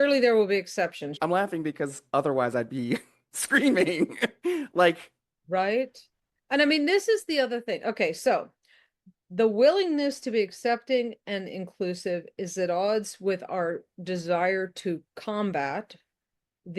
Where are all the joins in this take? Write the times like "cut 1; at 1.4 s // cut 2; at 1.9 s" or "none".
cut 1; at 1.1 s

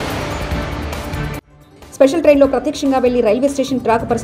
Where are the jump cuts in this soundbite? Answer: cut 1; at 1.4 s

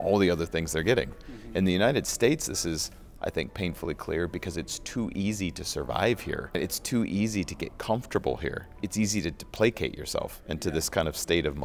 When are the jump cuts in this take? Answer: cut 1; at 6.6 s // cut 2; at 8.8 s

